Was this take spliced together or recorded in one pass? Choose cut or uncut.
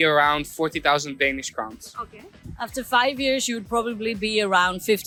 uncut